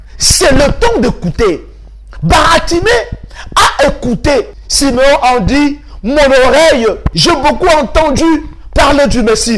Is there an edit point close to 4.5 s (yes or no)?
yes